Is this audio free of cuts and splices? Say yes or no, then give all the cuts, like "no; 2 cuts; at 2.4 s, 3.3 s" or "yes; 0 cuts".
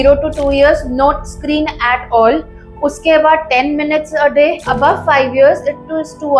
no; 1 cut; at 4.6 s